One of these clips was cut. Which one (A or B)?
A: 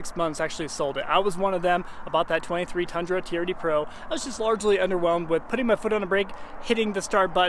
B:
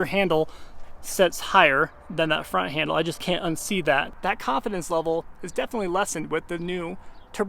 B